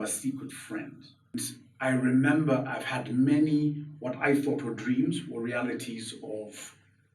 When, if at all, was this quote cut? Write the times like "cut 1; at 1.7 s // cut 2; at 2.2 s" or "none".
cut 1; at 1.3 s